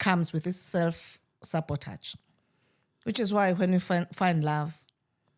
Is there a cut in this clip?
no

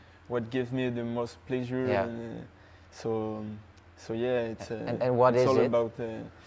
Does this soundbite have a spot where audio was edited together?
no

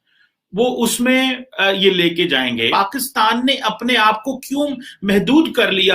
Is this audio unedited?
no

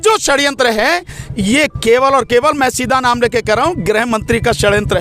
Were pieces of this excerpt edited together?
no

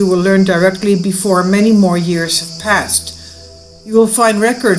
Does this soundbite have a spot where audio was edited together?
yes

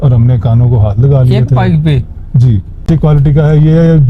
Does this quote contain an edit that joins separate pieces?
yes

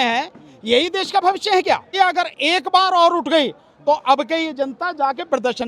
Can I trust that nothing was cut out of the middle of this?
no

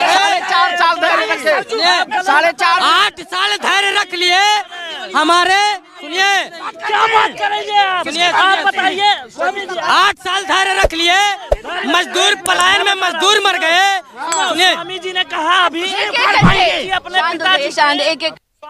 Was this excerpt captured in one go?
yes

